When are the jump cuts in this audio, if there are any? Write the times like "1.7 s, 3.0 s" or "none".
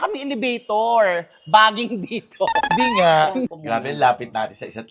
3.6 s